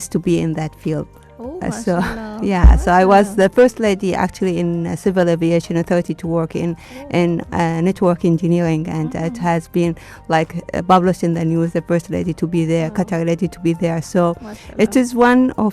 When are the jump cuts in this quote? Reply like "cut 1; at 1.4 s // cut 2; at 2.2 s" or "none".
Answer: none